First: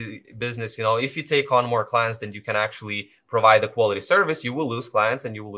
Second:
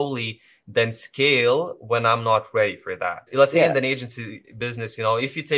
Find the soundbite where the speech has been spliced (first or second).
second